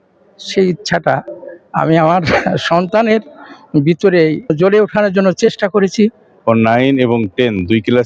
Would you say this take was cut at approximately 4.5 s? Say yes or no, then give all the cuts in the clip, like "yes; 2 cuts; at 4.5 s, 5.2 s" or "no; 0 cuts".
yes; 2 cuts; at 4.5 s, 6.3 s